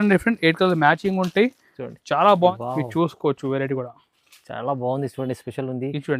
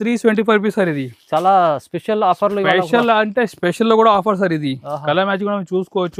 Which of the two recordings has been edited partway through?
first; 1 cut; at 2.5 s

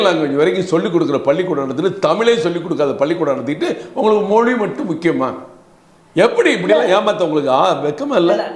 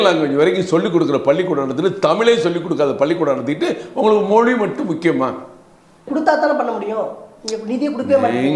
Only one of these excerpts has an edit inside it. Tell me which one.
second; 1 cut; at 6.1 s

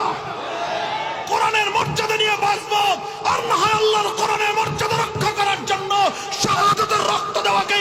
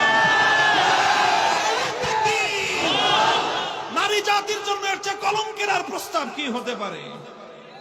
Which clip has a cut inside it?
second; 1 cut; at 3.7 s

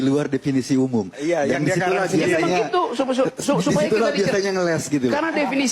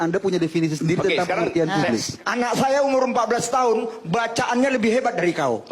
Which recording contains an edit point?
second; 1 cut; at 2.1 s

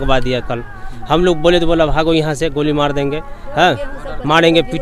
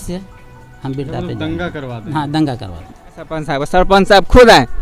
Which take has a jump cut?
second; 1 cut; at 3.4 s

